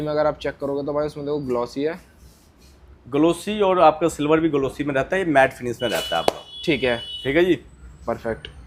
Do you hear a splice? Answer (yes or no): no